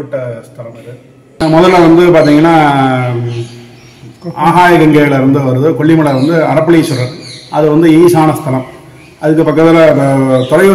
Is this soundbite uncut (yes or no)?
no